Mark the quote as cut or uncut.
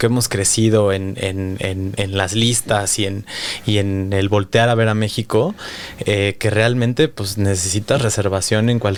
uncut